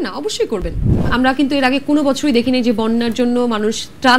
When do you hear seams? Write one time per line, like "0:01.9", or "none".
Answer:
0:00.9